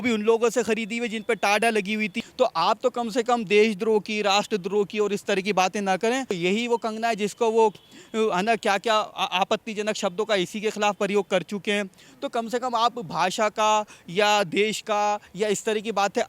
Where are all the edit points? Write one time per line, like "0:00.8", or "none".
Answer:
0:02.2
0:06.4